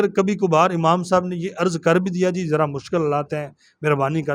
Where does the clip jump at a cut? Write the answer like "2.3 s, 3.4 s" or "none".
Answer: none